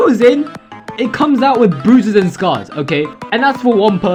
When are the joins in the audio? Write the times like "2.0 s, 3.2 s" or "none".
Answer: none